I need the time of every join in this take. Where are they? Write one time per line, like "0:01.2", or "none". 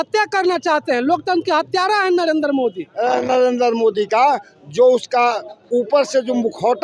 0:02.9